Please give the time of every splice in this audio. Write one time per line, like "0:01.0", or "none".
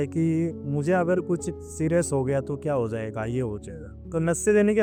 none